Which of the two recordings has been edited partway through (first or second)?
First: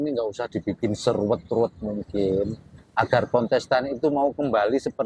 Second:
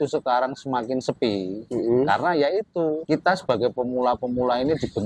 second